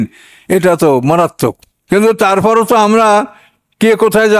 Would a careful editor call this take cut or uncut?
cut